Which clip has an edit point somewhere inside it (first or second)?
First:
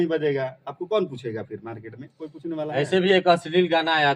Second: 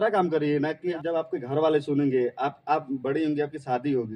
second